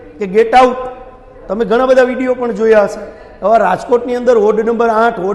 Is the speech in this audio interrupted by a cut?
no; 0 cuts

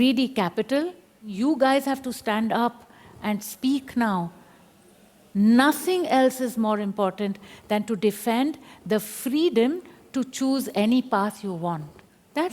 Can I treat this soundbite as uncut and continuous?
no; 1 cut; at 1.3 s

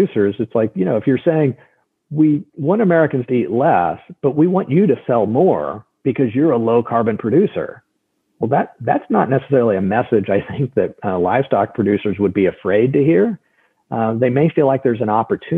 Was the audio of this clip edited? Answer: no; 0 cuts

